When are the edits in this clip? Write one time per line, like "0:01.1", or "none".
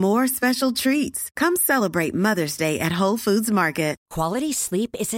0:04.0

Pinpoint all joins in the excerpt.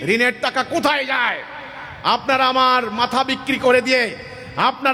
none

